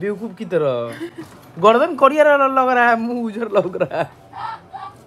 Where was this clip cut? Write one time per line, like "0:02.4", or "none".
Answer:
none